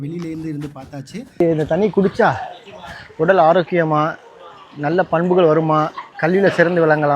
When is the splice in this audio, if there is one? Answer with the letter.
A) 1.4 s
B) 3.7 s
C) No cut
A